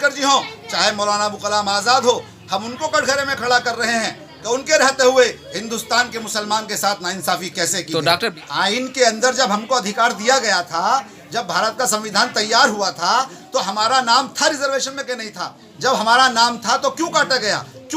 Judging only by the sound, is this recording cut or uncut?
cut